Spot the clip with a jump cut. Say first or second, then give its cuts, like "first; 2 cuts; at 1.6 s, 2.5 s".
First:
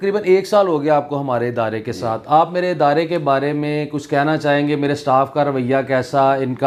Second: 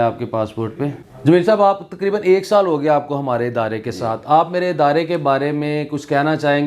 second; 1 cut; at 1.0 s